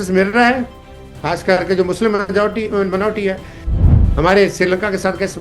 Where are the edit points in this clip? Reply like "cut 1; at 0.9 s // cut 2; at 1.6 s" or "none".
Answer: cut 1; at 3.8 s